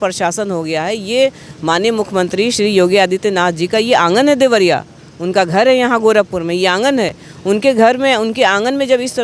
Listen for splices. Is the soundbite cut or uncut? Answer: uncut